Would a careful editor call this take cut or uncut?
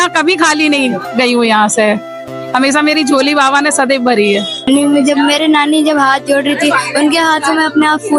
cut